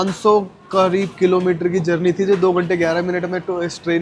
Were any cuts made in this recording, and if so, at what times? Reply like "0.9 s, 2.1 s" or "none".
none